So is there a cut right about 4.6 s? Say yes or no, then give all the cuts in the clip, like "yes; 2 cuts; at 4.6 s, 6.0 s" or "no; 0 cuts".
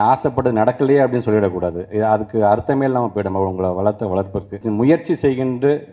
yes; 1 cut; at 4.6 s